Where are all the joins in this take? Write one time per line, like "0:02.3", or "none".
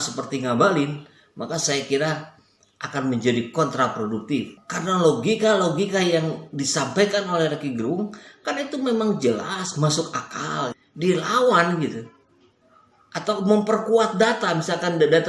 0:10.8